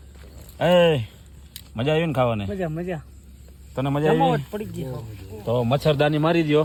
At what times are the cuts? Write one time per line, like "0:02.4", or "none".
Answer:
none